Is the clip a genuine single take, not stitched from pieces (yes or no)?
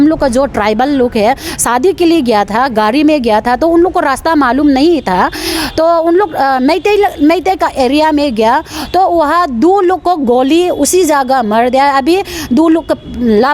yes